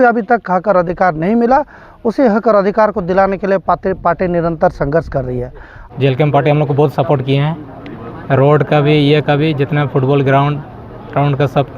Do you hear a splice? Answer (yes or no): yes